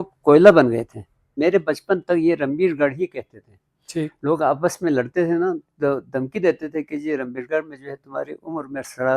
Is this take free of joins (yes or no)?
no